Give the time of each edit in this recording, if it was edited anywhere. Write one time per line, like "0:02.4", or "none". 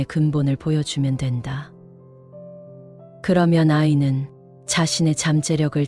0:01.7
0:03.2